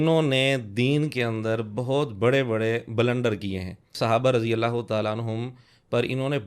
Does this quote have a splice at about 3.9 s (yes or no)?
yes